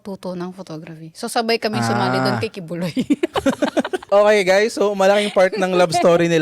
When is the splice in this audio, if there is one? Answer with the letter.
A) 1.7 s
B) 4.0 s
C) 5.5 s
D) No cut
B